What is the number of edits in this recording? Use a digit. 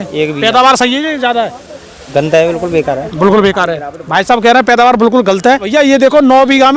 1